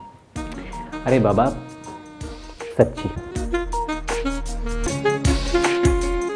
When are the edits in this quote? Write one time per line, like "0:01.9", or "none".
0:04.9